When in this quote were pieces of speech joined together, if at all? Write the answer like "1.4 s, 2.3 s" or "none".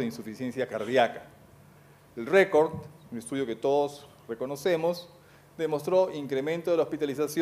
none